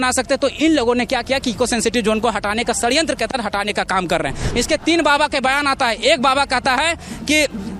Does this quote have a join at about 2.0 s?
no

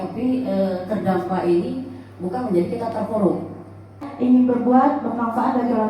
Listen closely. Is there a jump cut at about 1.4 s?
no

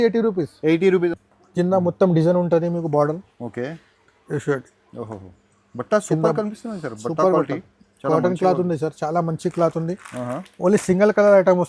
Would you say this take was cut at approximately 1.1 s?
yes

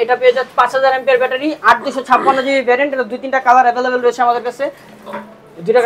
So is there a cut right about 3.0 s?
no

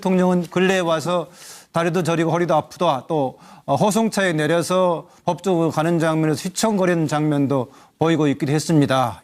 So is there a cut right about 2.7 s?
yes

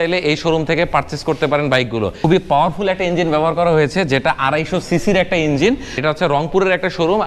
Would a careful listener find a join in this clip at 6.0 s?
yes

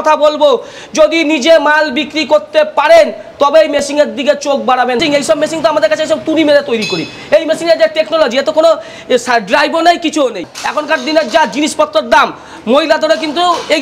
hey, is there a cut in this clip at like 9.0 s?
no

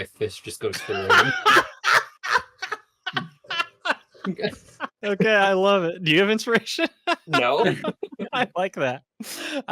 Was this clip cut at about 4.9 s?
yes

